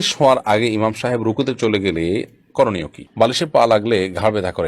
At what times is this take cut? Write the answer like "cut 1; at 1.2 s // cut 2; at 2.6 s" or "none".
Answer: cut 1; at 3.1 s